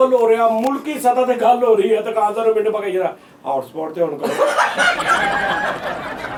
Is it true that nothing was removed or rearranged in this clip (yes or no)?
yes